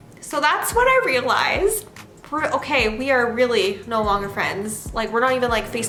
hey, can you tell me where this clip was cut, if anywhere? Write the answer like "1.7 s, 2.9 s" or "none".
none